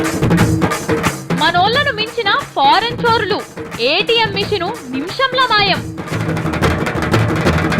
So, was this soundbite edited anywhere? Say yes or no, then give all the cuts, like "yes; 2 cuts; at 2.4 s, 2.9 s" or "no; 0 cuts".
yes; 1 cut; at 0.9 s